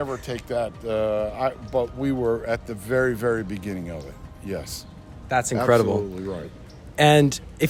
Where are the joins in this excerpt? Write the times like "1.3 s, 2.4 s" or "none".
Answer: none